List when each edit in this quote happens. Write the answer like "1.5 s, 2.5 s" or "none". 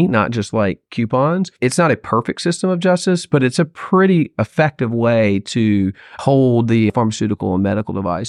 1.5 s, 6.2 s, 6.9 s